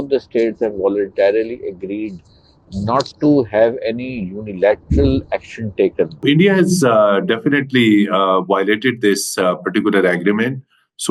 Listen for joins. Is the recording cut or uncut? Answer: cut